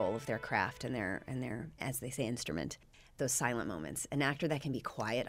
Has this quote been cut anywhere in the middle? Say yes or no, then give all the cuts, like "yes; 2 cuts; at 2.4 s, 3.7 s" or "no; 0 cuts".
yes; 1 cut; at 3.0 s